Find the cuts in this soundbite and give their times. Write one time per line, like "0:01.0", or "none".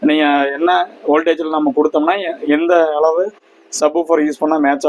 none

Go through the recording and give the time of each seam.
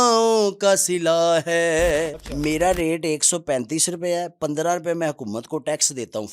0:02.2

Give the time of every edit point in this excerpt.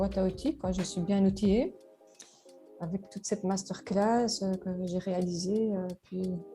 none

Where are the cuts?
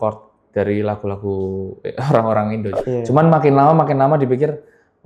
0:02.8

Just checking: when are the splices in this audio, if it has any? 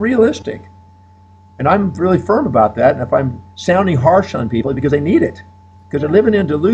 none

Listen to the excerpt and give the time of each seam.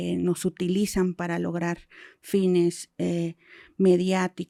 none

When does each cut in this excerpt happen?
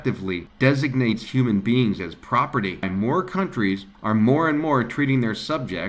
0:02.9

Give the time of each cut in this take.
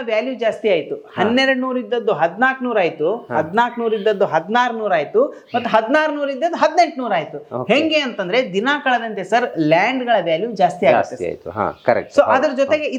none

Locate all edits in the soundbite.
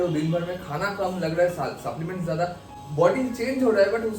0:02.6

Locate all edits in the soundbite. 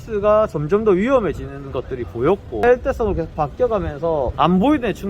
0:02.6
0:04.3

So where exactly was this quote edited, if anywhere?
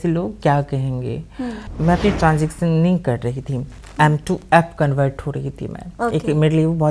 0:01.6

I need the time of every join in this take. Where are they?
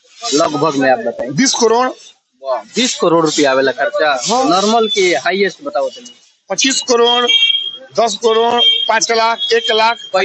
none

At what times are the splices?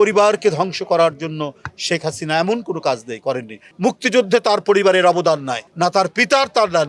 0:03.6
0:05.6

